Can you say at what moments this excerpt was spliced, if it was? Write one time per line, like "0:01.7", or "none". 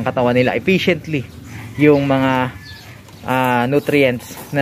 none